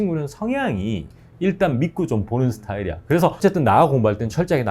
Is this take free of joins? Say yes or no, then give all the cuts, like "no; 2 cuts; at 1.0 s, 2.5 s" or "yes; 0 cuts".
no; 1 cut; at 3.4 s